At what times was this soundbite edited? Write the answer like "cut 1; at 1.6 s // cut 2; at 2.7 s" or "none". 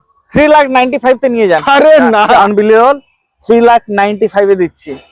cut 1; at 2.4 s